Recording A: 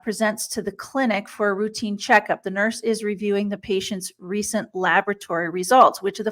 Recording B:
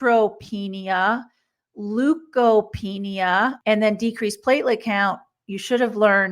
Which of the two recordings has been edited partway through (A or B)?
B